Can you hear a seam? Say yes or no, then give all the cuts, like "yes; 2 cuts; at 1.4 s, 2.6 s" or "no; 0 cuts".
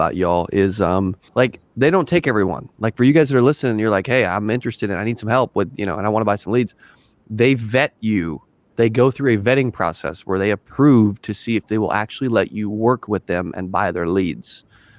yes; 1 cut; at 1.2 s